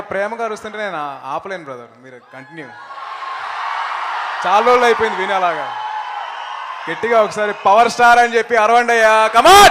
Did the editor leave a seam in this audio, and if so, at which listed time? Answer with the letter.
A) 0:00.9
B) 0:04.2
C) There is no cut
A